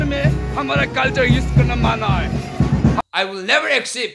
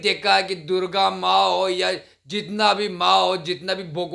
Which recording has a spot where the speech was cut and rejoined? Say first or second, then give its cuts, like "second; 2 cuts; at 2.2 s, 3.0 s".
first; 1 cut; at 3.0 s